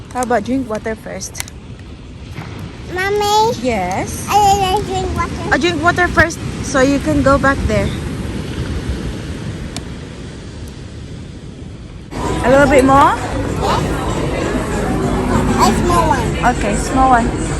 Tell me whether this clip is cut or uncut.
cut